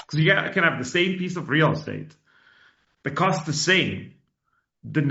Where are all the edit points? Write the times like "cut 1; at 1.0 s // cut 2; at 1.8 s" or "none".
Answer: none